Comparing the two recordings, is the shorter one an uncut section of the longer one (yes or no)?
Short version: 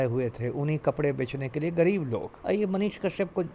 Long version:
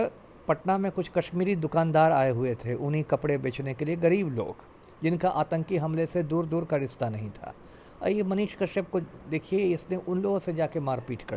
no